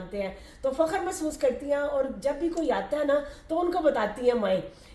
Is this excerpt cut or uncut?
uncut